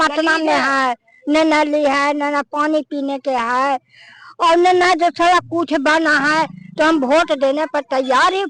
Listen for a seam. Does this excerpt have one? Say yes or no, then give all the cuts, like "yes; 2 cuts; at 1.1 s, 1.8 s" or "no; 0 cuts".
no; 0 cuts